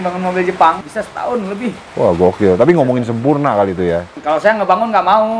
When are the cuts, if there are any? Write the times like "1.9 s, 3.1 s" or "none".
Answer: 0.8 s, 4.2 s